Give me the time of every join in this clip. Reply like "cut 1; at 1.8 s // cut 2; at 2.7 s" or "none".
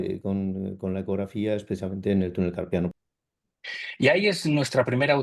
cut 1; at 2.9 s